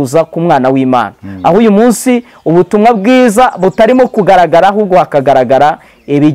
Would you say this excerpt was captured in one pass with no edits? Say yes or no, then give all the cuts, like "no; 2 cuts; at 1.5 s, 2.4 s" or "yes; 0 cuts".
yes; 0 cuts